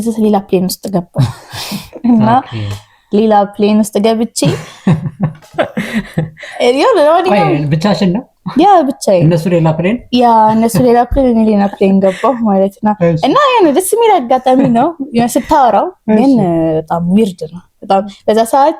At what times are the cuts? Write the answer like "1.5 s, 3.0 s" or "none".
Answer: none